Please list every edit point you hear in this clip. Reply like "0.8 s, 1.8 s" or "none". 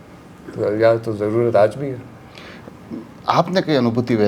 none